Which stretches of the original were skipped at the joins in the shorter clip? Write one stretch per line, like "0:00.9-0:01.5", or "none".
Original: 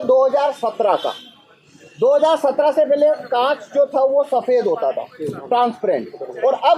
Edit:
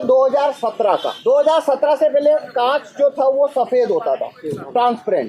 0:01.1-0:01.9